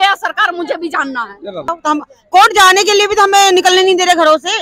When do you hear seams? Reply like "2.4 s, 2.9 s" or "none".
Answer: 1.8 s